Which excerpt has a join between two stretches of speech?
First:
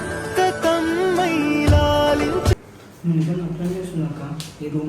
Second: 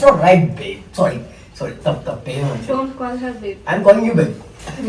first; 1 cut; at 2.6 s

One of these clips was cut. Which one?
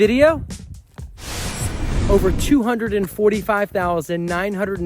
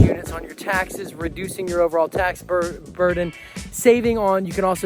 first; 1 cut; at 2.0 s

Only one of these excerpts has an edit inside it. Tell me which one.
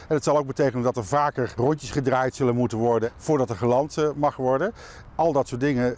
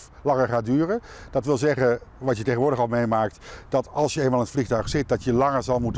first; 1 cut; at 5.0 s

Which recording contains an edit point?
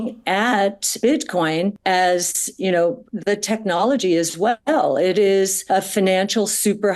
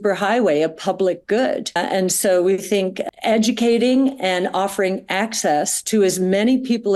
first; 2 cuts; at 1.0 s, 5.6 s

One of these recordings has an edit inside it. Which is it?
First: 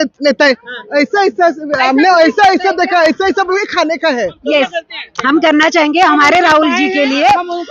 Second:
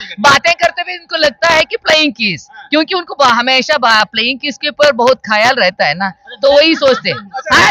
first; 1 cut; at 4.3 s

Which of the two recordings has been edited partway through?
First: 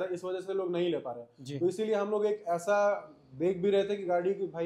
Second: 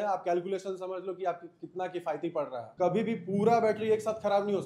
second; 1 cut; at 2.6 s

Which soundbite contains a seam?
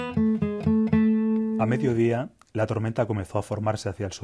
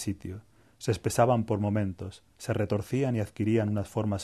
first; 1 cut; at 1.6 s

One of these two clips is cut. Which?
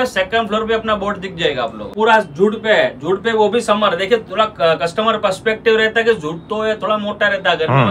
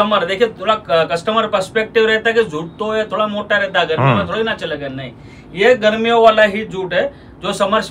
first; 1 cut; at 1.9 s

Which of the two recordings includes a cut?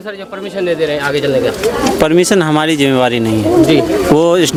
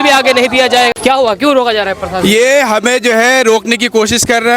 second; 1 cut; at 0.9 s

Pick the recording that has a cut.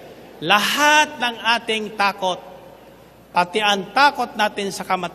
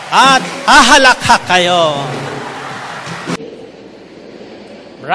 second; 1 cut; at 3.4 s

